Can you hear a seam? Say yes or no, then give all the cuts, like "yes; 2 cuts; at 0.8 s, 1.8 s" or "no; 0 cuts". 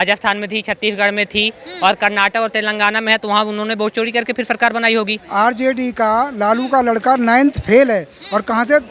yes; 1 cut; at 5.2 s